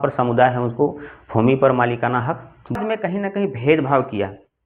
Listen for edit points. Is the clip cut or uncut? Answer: cut